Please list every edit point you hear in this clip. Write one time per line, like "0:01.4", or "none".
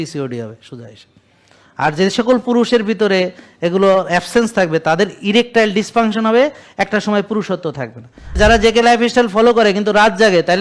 0:08.4